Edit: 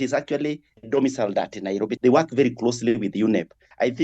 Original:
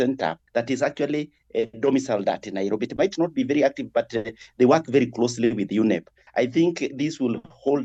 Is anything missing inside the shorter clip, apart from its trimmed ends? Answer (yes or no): yes